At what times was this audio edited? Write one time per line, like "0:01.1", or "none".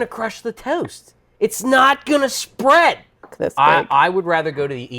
0:03.4